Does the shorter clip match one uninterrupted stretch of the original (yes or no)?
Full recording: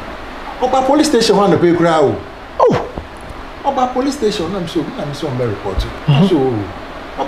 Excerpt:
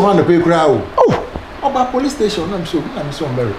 no